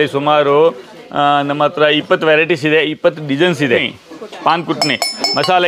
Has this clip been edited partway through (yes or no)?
yes